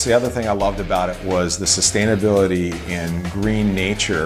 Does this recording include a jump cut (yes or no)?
yes